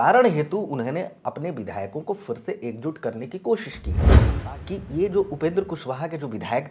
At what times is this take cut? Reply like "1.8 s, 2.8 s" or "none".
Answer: 4.2 s